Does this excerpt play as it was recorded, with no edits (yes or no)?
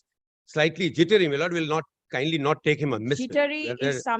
yes